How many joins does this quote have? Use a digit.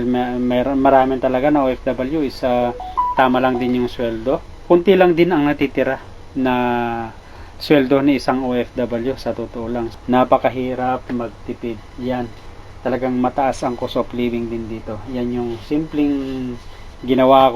2